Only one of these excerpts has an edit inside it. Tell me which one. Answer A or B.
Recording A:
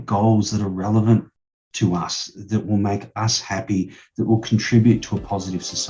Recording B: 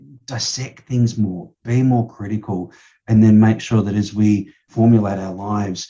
B